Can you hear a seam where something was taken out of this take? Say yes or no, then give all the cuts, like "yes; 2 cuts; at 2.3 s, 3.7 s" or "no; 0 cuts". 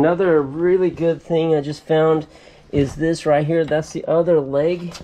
no; 0 cuts